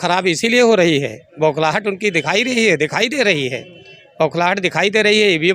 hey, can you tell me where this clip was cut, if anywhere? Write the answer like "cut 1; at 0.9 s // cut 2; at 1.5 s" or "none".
none